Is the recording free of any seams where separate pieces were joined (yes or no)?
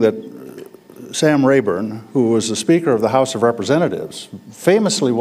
yes